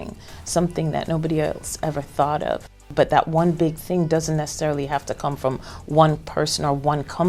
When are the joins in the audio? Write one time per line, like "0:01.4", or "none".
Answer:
0:02.9